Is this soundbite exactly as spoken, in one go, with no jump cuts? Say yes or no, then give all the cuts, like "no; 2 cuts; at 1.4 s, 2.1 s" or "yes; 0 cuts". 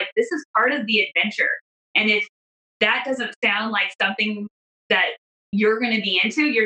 yes; 0 cuts